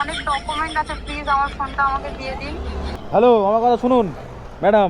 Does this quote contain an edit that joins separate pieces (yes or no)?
yes